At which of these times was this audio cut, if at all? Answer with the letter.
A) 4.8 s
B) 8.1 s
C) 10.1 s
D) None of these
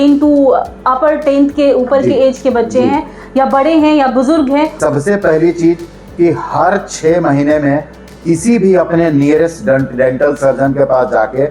A